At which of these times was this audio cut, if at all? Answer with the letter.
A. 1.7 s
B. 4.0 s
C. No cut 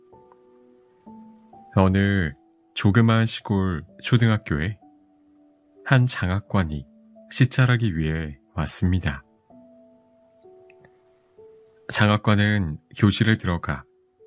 A